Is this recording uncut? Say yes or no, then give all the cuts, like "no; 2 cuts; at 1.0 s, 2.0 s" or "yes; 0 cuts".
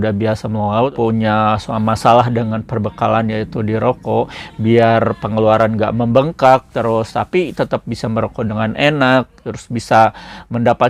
no; 1 cut; at 0.9 s